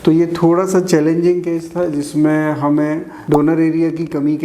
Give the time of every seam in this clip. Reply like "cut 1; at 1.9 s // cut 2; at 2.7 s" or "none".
cut 1; at 3.3 s